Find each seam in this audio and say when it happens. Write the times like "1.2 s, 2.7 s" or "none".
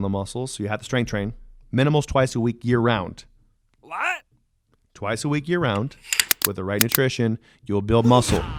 none